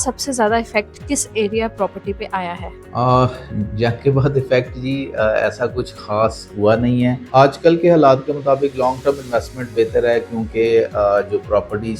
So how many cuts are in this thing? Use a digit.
1